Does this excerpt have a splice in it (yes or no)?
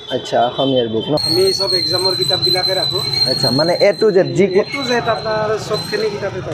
yes